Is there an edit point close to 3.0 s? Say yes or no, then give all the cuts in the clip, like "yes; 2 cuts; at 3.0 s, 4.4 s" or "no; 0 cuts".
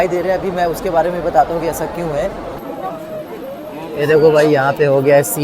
yes; 1 cut; at 3.0 s